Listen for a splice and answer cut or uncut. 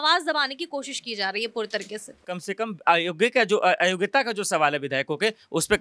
cut